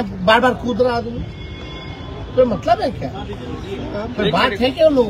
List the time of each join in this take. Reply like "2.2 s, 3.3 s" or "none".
none

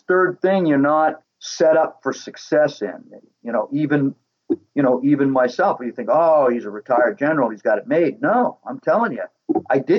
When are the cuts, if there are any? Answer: 1.2 s

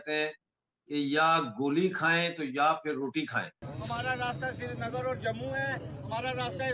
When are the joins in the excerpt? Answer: 3.7 s

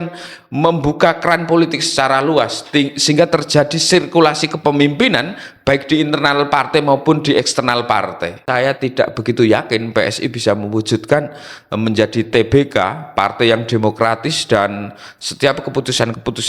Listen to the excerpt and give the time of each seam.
8.4 s

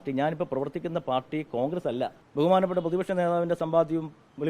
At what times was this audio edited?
2.2 s

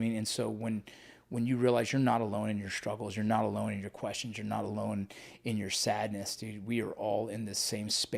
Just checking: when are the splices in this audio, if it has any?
none

